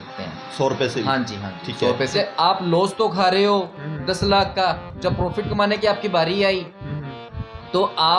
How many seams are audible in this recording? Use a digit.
1